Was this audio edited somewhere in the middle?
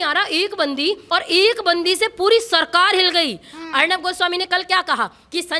yes; 1 cut; at 1.0 s

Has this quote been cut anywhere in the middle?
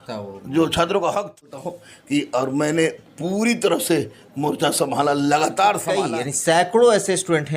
yes; 2 cuts; at 1.6 s, 5.9 s

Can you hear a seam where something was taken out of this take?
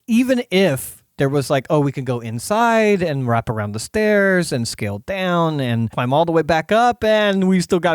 yes; 1 cut; at 5.9 s

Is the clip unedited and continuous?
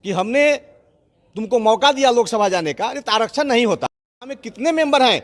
yes; 0 cuts

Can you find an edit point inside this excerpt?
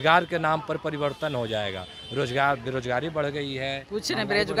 no; 0 cuts

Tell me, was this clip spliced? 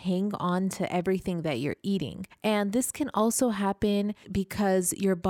yes; 2 cuts; at 2.2 s, 4.2 s

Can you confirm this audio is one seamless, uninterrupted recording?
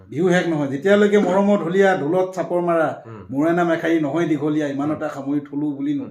yes; 0 cuts

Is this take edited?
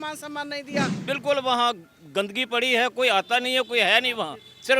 yes; 1 cut; at 1.0 s

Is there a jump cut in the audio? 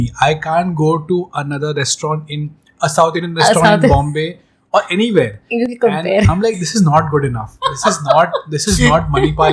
no; 0 cuts

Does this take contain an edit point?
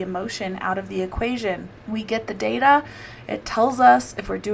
yes; 1 cut; at 1.7 s

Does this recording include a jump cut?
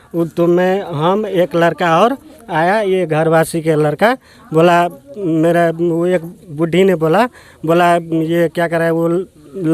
no; 0 cuts

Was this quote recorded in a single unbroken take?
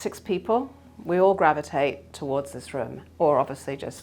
yes; 0 cuts

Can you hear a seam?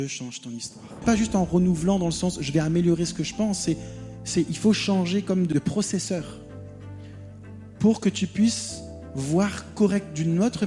yes; 2 cuts; at 1.0 s, 5.5 s

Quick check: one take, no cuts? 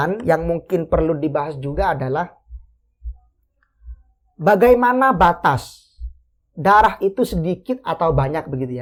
yes; 0 cuts

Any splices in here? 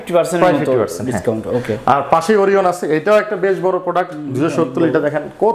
no; 0 cuts

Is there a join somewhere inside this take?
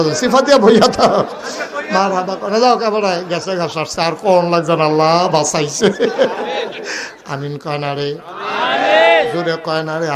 no; 0 cuts

